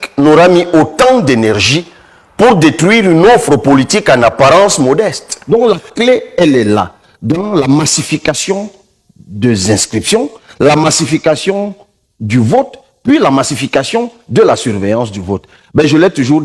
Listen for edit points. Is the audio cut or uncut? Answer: cut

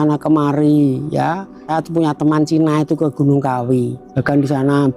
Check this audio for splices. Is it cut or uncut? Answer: cut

